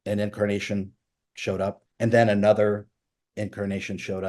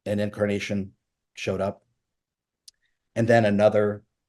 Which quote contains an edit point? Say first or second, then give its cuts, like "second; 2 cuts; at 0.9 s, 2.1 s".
first; 1 cut; at 1.9 s